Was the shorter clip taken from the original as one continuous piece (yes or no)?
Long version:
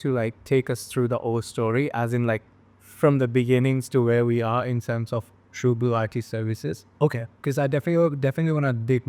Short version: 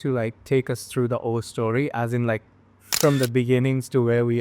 yes